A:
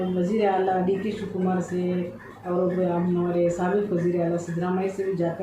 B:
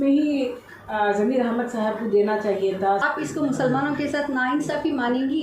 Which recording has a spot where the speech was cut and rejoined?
B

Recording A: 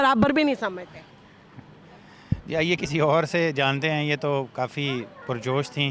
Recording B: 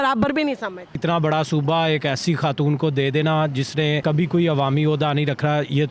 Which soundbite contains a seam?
B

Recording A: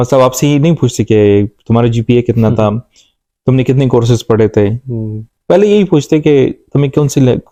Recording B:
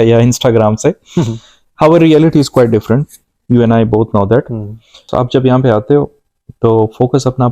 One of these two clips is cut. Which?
B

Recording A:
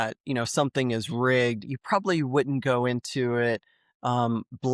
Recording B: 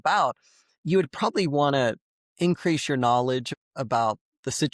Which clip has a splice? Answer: B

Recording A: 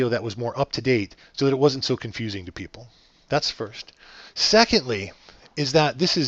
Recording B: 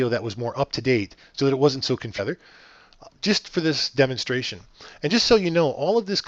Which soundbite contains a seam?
A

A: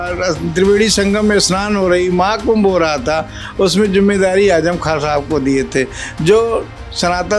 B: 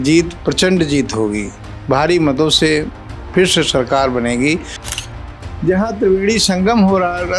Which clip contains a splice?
B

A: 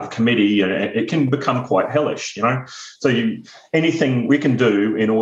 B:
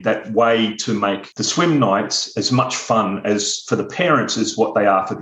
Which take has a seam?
B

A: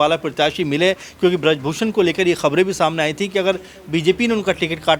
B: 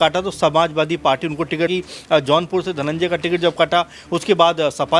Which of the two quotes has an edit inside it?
B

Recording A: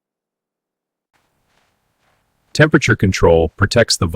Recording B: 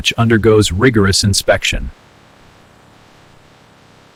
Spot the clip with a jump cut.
A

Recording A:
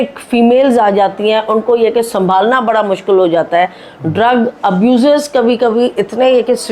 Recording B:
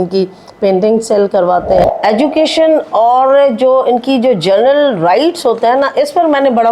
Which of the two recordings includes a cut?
B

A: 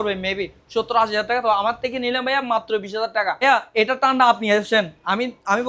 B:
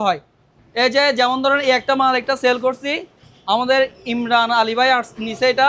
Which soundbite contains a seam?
A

